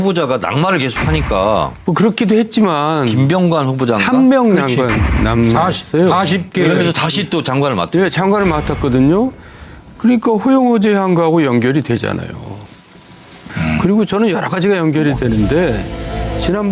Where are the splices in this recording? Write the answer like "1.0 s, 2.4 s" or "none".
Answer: 5.5 s